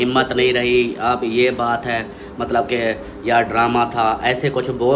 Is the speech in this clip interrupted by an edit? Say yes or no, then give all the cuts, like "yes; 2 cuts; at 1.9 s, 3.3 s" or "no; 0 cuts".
no; 0 cuts